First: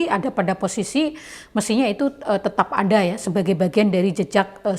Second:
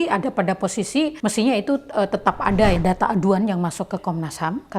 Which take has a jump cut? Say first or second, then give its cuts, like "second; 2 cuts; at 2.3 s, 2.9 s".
second; 2 cuts; at 1.2 s, 2.8 s